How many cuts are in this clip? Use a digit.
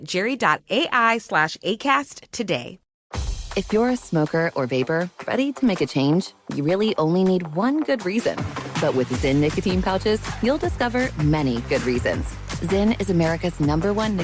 1